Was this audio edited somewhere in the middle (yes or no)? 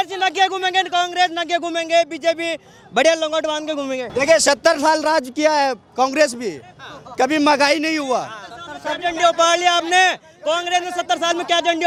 no